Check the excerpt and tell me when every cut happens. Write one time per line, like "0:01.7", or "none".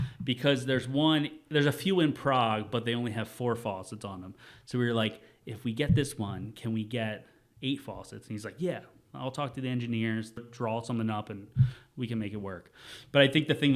0:10.4